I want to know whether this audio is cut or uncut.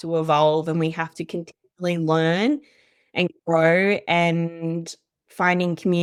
uncut